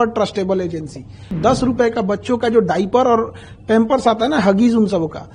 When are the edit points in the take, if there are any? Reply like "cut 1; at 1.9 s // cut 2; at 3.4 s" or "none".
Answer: cut 1; at 1.3 s